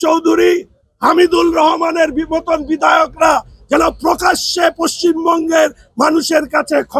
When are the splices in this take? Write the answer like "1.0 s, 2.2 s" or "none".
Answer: none